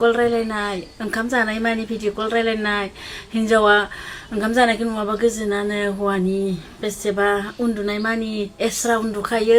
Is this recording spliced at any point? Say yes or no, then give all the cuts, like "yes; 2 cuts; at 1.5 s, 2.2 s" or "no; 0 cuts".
no; 0 cuts